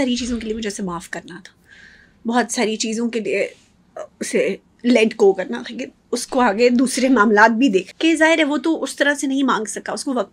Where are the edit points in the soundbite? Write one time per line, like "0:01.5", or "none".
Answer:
0:07.9